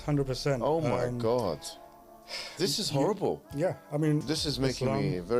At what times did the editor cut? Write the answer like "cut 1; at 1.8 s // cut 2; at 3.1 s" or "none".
cut 1; at 4.2 s